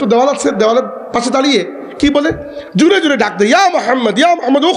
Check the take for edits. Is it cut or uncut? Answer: uncut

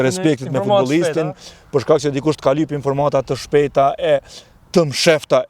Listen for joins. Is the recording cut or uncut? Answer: uncut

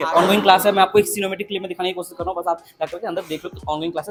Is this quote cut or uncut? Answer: uncut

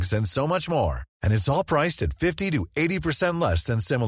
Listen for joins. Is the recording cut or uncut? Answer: uncut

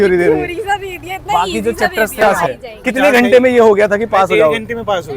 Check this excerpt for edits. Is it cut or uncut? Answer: cut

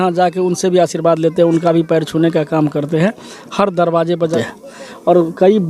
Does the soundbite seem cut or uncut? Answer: cut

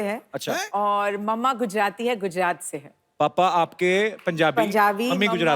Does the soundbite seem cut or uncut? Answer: uncut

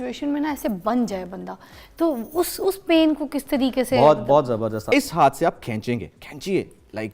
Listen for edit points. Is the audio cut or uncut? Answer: cut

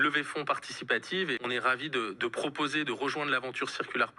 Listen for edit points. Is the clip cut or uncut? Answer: cut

